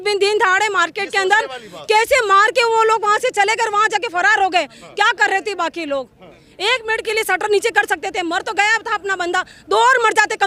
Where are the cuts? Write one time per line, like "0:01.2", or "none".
none